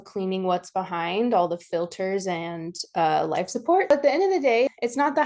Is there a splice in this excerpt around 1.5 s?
no; 1 cut; at 3.9 s

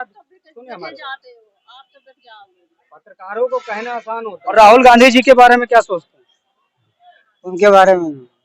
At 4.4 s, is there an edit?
yes; 1 cut; at 4.4 s

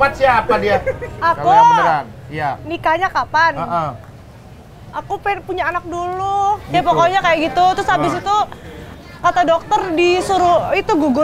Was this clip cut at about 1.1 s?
yes; 2 cuts; at 1.1 s, 6.6 s

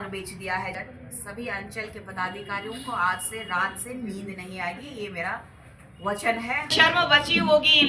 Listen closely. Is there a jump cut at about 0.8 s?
yes; 2 cuts; at 0.8 s, 6.7 s

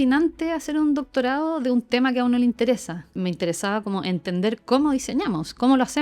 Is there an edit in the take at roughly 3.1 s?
yes; 1 cut; at 3.1 s

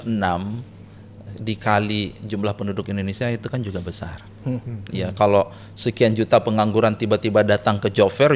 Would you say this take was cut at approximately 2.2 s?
no; 1 cut; at 4.9 s

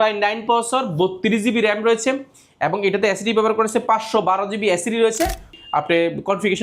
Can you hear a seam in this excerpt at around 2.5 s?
no; 1 cut; at 5.6 s

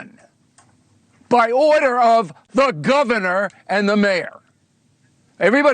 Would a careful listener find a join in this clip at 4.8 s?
yes; 1 cut; at 4.8 s

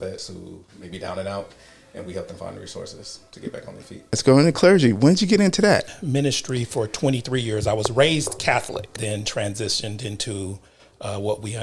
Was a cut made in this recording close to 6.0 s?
yes; 3 cuts; at 4.2 s, 6.0 s, 9.0 s

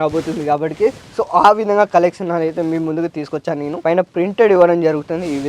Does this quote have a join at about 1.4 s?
no; 1 cut; at 3.8 s

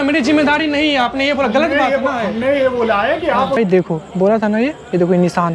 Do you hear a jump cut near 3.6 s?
yes; 1 cut; at 3.6 s

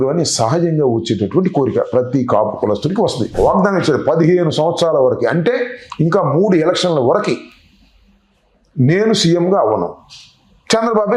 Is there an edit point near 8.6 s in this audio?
no; 1 cut; at 3.3 s

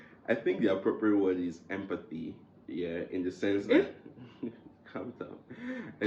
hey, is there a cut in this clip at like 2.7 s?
no; 0 cuts

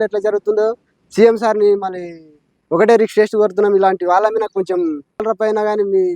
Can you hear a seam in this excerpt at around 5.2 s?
yes; 1 cut; at 5.2 s

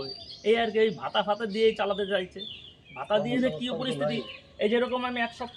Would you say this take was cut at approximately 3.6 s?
no; 0 cuts

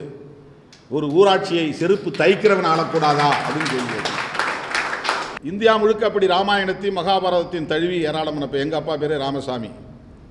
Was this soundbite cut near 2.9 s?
no; 1 cut; at 5.3 s

